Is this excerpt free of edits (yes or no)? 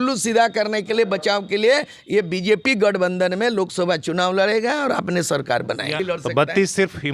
no